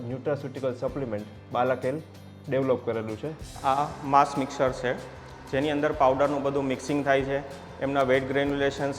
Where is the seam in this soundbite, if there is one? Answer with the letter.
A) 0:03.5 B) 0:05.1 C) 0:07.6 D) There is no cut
A